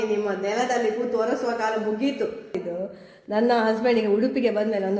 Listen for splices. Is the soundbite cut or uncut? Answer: cut